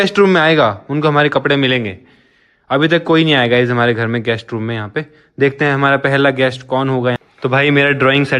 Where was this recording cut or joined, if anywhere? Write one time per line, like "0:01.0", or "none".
0:07.2